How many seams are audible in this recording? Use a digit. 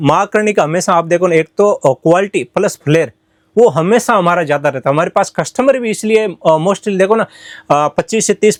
0